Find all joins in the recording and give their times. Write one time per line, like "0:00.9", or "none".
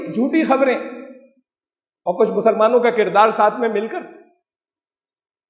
none